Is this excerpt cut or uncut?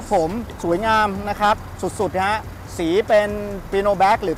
uncut